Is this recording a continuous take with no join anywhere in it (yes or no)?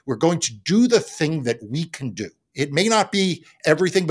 yes